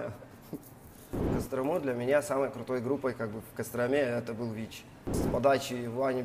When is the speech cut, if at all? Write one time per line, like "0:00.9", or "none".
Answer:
0:01.3
0:05.2